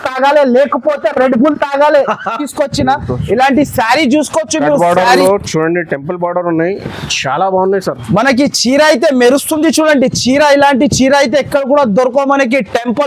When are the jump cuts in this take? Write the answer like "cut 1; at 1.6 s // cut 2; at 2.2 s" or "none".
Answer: cut 1; at 2.4 s